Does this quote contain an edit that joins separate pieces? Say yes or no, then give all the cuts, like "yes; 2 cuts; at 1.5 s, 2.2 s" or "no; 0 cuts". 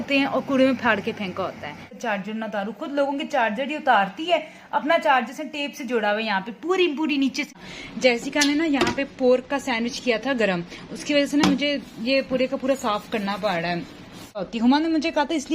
yes; 3 cuts; at 1.9 s, 7.5 s, 14.5 s